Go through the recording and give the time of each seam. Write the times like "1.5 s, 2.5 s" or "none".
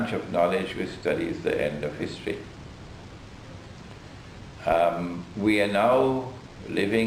none